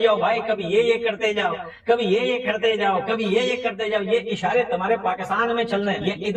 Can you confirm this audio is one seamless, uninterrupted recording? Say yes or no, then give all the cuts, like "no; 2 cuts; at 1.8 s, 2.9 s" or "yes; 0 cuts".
yes; 0 cuts